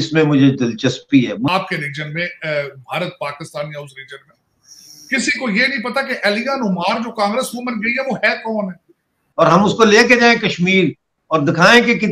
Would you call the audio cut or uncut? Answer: cut